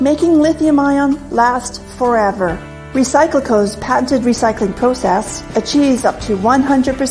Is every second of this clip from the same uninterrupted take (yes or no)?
no